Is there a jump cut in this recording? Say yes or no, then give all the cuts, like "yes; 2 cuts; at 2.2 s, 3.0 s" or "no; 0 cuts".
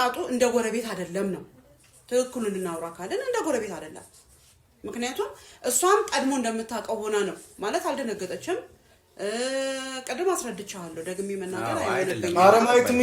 no; 0 cuts